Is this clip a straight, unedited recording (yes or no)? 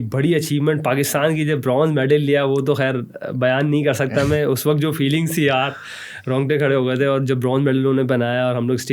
yes